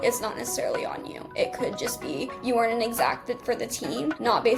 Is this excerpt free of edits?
yes; 0 cuts

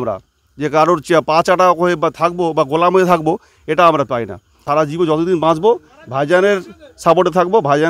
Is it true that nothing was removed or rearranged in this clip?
no; 1 cut; at 4.6 s

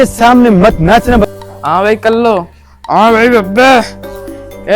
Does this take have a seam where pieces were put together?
yes; 1 cut; at 1.3 s

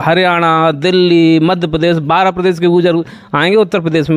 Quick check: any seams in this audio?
no; 0 cuts

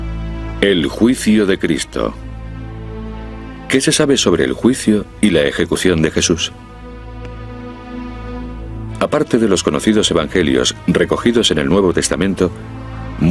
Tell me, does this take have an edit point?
no; 0 cuts

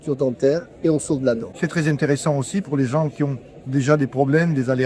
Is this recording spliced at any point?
yes; 1 cut; at 1.5 s

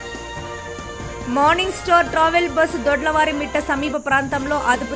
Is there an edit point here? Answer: yes; 1 cut; at 1.2 s

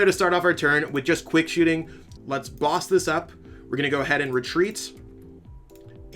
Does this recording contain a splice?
yes; 1 cut; at 2.0 s

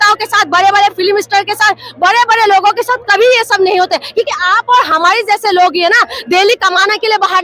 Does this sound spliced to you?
no; 0 cuts

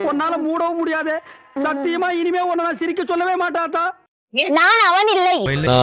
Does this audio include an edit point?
yes; 1 cut; at 4.0 s

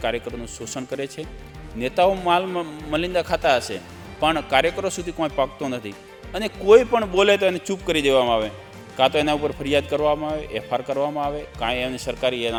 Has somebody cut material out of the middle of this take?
no; 0 cuts

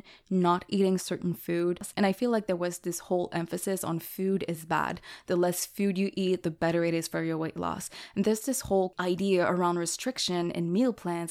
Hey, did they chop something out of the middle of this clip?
no; 0 cuts

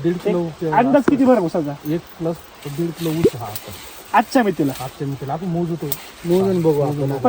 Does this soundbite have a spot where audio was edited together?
no; 0 cuts

